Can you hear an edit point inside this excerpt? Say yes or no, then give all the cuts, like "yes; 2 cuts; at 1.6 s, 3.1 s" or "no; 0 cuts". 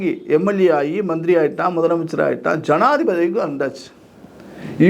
no; 0 cuts